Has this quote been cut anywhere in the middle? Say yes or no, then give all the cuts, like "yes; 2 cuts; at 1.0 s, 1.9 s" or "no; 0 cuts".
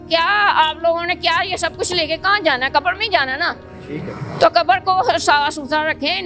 no; 0 cuts